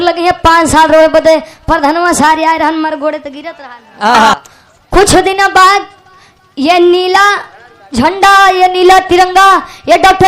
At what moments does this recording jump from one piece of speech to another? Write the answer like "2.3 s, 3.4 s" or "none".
4.3 s